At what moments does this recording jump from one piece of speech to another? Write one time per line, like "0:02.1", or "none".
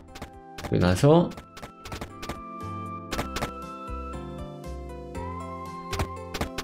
none